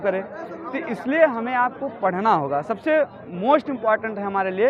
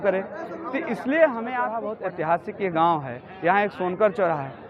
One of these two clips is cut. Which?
second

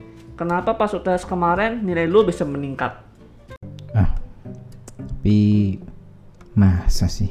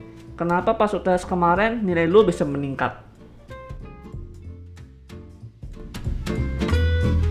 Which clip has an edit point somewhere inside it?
first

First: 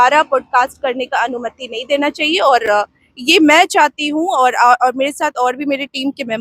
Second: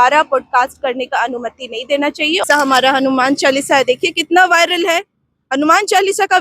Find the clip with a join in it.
second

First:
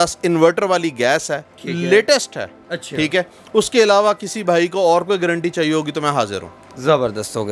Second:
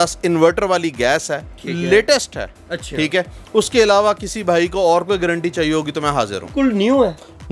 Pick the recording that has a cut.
second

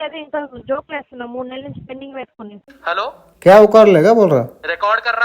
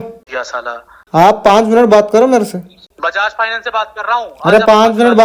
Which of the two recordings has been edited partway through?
first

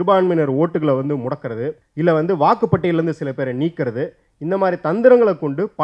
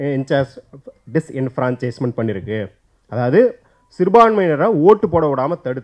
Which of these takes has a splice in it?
first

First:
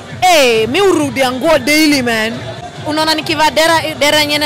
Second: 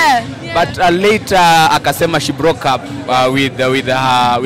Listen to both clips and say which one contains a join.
first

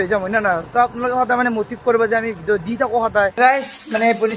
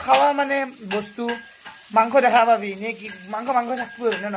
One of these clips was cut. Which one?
first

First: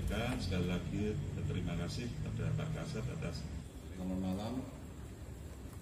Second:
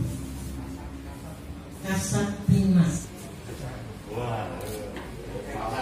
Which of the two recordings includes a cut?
first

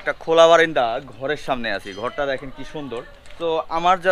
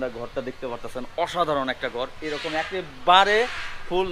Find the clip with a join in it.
first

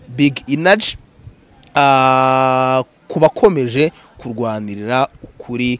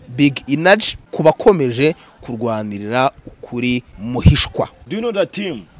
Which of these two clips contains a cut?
second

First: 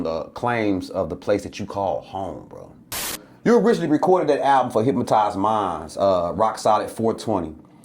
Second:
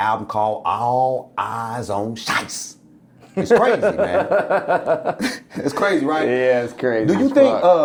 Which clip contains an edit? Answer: first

